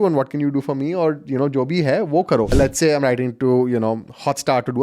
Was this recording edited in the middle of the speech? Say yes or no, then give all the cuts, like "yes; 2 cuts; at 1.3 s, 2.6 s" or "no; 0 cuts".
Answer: yes; 1 cut; at 2.5 s